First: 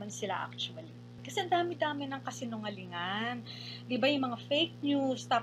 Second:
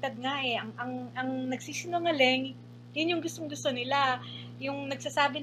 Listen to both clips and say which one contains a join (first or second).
first